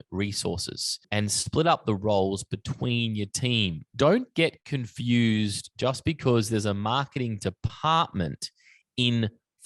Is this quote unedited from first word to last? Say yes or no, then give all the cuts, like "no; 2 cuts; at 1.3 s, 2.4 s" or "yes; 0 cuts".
no; 2 cuts; at 1.0 s, 3.8 s